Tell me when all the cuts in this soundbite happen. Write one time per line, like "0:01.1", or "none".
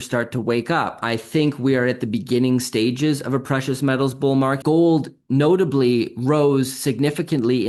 0:01.0
0:04.6